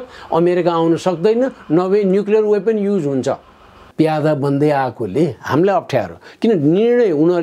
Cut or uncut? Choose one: cut